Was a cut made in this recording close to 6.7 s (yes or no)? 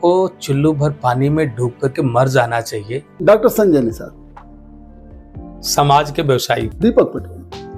yes